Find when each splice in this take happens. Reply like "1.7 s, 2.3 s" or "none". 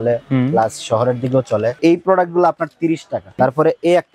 1.8 s, 3.3 s